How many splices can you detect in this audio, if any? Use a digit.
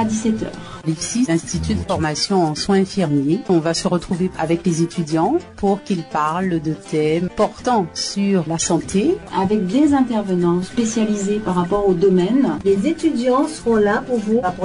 1